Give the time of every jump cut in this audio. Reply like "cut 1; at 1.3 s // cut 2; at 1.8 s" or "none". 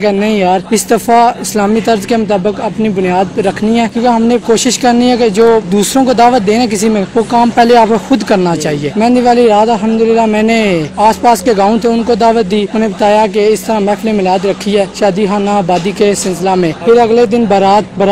cut 1; at 3.9 s // cut 2; at 8.8 s // cut 3; at 10.9 s // cut 4; at 16.8 s

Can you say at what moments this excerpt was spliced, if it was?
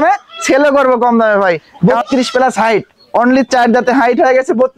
cut 1; at 1.7 s

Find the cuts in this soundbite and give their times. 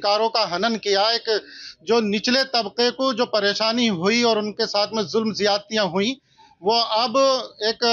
none

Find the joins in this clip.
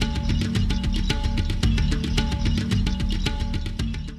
none

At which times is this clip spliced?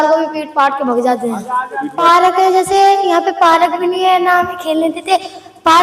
cut 1; at 1.8 s

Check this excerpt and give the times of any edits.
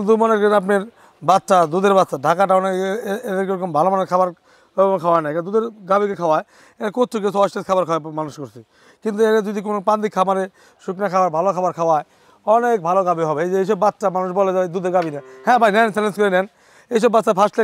none

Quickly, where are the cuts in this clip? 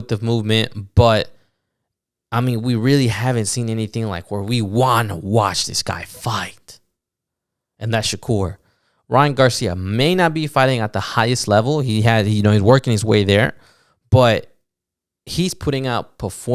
none

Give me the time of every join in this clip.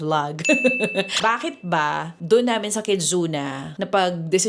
cut 1; at 1.1 s

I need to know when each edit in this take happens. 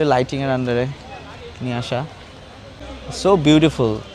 cut 1; at 2.8 s

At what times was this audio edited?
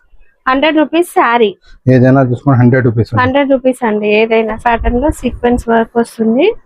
cut 1; at 4.6 s

